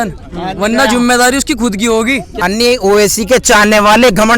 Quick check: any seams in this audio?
yes; 1 cut; at 2.3 s

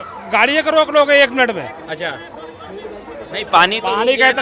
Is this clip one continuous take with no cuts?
yes; 0 cuts

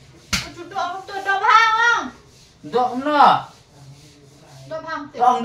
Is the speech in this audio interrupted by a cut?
yes; 1 cut; at 2.2 s

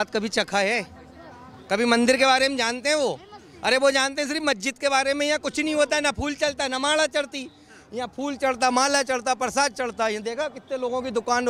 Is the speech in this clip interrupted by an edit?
no; 0 cuts

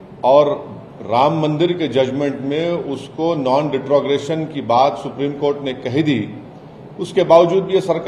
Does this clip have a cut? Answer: no; 0 cuts

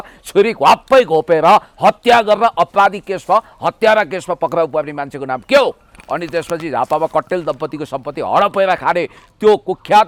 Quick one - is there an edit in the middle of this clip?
no; 0 cuts

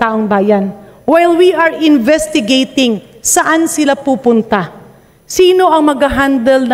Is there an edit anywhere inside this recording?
no; 0 cuts

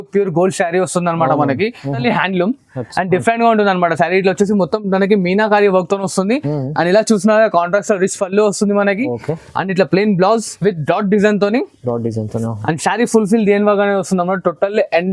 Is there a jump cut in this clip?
yes; 1 cut; at 2.0 s

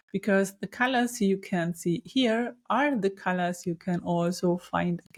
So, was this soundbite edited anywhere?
no; 0 cuts

